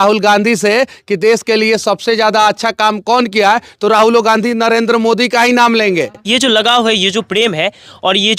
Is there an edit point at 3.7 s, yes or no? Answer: no